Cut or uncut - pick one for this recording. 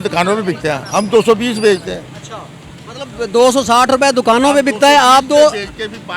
uncut